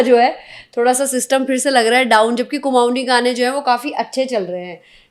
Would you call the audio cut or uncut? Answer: uncut